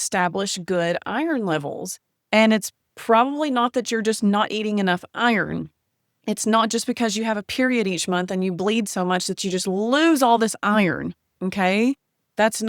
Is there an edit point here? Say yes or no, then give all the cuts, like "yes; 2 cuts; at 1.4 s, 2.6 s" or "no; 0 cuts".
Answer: no; 0 cuts